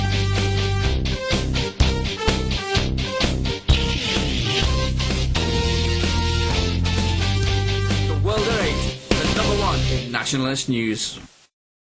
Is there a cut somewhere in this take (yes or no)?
no